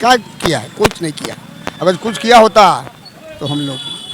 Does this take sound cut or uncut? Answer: uncut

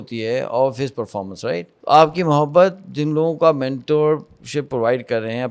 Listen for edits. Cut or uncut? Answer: cut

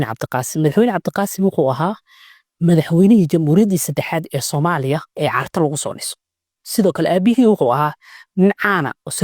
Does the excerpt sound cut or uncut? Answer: uncut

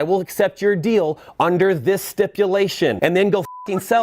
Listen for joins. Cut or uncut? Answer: cut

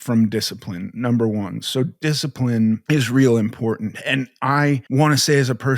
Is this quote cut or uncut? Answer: cut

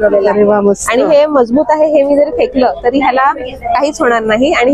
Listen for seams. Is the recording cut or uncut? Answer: uncut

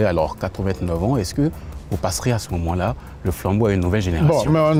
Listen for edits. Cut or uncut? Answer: uncut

